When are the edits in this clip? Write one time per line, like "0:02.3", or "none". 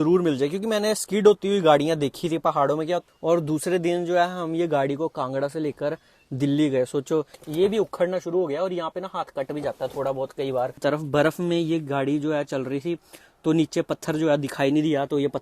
0:03.1
0:07.4
0:10.7